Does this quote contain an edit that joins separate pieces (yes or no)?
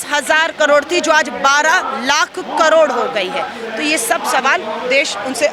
no